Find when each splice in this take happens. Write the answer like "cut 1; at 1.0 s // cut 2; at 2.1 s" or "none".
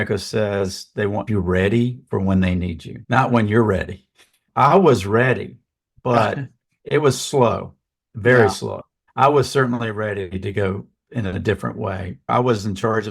cut 1; at 1.3 s // cut 2; at 6.7 s